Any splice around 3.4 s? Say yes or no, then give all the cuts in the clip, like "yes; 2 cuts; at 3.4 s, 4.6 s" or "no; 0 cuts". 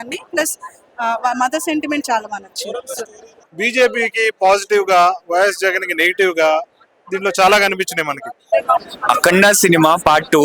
yes; 2 cuts; at 3.4 s, 8.3 s